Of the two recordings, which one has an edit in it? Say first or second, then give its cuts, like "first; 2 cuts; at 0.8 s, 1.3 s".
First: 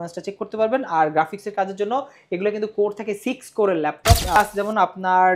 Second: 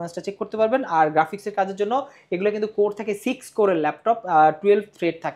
first; 1 cut; at 4.4 s